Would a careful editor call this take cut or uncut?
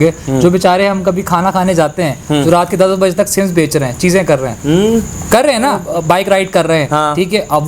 uncut